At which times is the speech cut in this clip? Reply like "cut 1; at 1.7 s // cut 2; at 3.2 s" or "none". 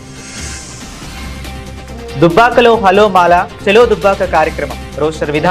cut 1; at 1.4 s